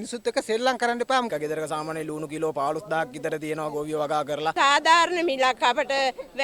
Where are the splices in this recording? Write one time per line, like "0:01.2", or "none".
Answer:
0:01.3
0:04.5